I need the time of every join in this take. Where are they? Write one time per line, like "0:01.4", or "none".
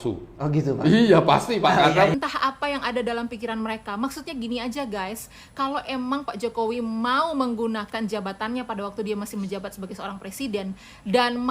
0:02.1